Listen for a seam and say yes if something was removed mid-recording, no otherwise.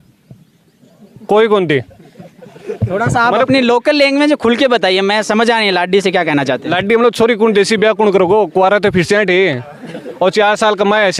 no